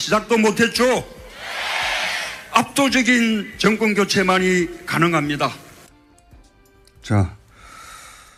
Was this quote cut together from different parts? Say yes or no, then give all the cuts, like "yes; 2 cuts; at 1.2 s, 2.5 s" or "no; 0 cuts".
no; 0 cuts